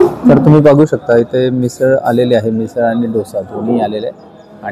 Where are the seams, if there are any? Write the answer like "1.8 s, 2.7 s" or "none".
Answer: none